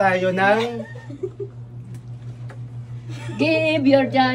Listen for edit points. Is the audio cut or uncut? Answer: uncut